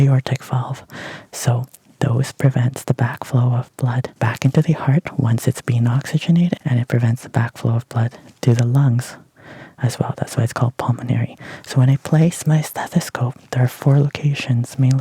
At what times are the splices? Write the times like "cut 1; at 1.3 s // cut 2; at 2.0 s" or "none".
cut 1; at 4.1 s // cut 2; at 6.6 s